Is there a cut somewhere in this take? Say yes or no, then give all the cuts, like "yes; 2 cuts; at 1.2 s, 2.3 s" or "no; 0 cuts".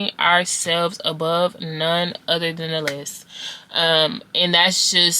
no; 0 cuts